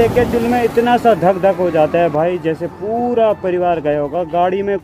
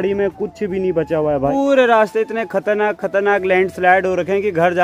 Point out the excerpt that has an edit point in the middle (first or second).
second